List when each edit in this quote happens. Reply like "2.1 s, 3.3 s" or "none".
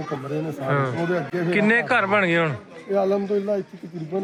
none